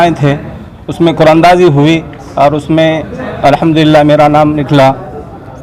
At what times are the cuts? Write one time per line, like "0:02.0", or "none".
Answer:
none